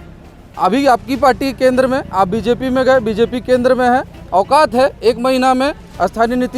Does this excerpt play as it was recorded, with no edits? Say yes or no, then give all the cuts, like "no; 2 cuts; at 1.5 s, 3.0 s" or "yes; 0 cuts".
yes; 0 cuts